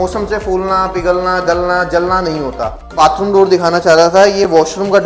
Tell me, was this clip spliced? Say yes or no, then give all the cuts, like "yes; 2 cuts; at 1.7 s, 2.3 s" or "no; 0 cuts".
yes; 1 cut; at 2.9 s